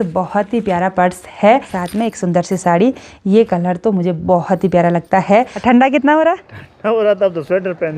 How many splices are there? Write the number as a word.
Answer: two